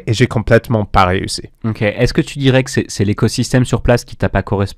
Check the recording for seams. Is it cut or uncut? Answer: uncut